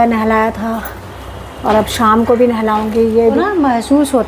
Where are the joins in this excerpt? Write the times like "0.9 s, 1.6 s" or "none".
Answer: 3.4 s